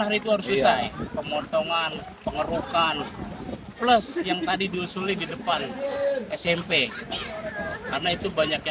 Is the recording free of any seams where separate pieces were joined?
yes; 0 cuts

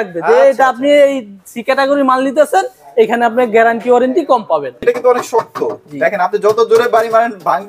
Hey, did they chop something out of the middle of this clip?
yes; 1 cut; at 4.8 s

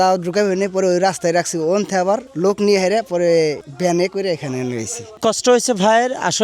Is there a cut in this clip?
yes; 3 cuts; at 2.3 s, 3.7 s, 5.2 s

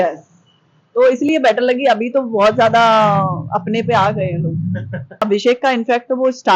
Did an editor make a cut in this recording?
yes; 1 cut; at 5.2 s

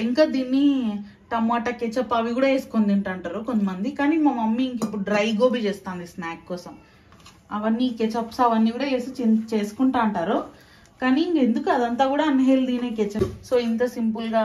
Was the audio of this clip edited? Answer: yes; 1 cut; at 13.2 s

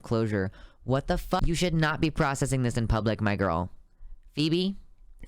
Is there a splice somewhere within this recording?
yes; 1 cut; at 1.4 s

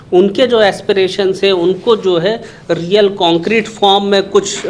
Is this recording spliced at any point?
no; 0 cuts

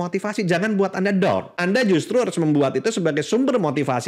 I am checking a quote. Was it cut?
yes; 1 cut; at 1.5 s

